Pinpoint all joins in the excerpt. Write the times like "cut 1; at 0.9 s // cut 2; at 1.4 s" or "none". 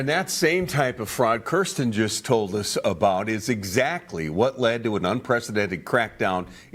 none